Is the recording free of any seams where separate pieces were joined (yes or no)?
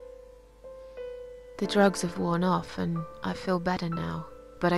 no